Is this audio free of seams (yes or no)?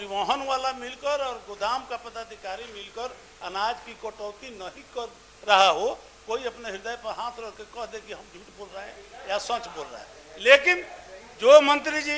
yes